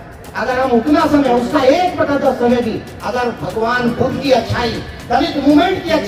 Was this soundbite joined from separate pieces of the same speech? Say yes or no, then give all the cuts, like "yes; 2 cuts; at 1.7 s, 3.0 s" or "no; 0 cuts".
no; 0 cuts